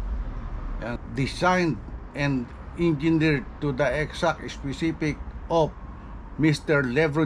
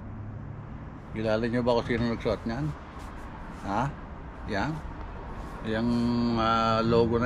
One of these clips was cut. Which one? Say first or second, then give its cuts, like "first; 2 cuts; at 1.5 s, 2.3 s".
first; 1 cut; at 1.0 s